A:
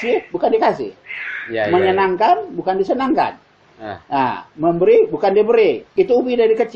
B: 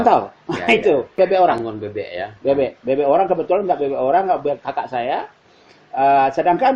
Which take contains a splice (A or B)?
B